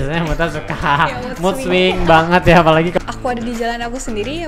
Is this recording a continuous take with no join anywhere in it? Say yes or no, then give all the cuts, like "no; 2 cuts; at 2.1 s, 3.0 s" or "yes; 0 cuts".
no; 1 cut; at 2.9 s